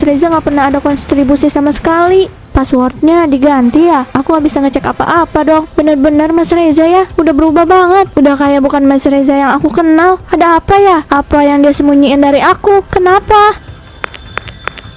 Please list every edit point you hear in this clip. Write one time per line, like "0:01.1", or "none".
0:13.9